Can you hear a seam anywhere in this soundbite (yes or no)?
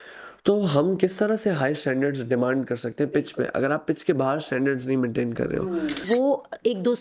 yes